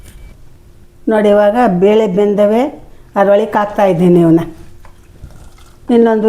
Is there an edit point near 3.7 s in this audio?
no; 1 cut; at 1.1 s

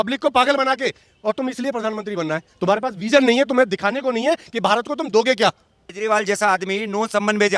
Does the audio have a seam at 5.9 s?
yes; 1 cut; at 5.9 s

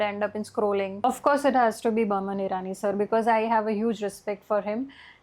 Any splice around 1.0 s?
yes; 1 cut; at 1.0 s

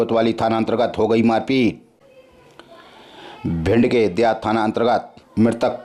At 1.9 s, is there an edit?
yes; 1 cut; at 1.9 s

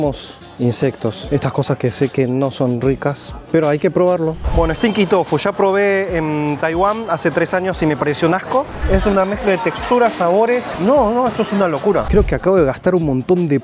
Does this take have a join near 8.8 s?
yes; 3 cuts; at 4.4 s, 8.8 s, 12.1 s

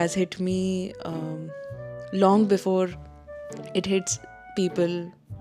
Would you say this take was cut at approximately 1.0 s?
no; 0 cuts

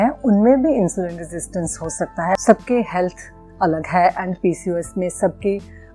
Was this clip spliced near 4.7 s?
no; 1 cut; at 2.4 s

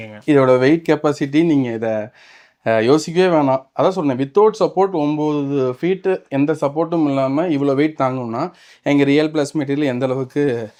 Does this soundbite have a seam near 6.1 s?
no; 0 cuts

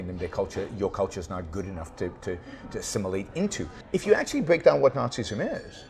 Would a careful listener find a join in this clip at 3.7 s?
yes; 1 cut; at 3.7 s

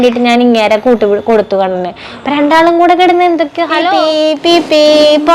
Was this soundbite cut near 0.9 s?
no; 1 cut; at 3.9 s

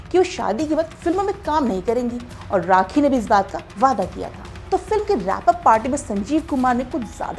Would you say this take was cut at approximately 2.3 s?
no; 1 cut; at 4.5 s

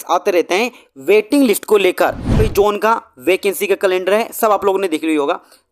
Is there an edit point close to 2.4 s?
yes; 1 cut; at 2.4 s

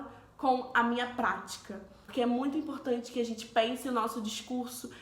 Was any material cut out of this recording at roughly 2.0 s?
yes; 1 cut; at 2.0 s

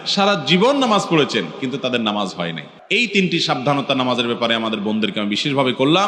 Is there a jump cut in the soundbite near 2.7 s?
yes; 1 cut; at 2.7 s

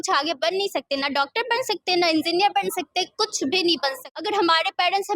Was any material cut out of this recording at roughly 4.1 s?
yes; 1 cut; at 4.1 s

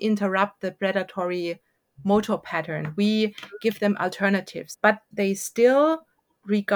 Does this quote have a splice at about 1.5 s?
no; 1 cut; at 5.0 s

